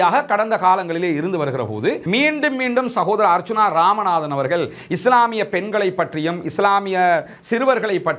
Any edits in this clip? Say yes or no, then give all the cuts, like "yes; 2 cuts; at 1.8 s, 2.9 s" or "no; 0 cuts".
yes; 1 cut; at 2.0 s